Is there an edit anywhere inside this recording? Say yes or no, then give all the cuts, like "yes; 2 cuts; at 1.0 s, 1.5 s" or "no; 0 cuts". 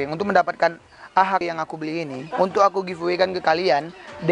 yes; 1 cut; at 1.4 s